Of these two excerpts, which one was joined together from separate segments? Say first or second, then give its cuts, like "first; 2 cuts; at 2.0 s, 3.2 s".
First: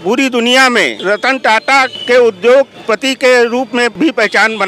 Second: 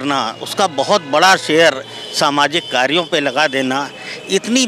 first; 4 cuts; at 0.9 s, 2.0 s, 2.8 s, 3.9 s